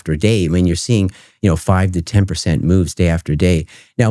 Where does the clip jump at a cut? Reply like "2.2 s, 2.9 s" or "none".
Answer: none